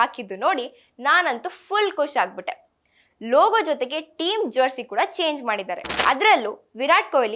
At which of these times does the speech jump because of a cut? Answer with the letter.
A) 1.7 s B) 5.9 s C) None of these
B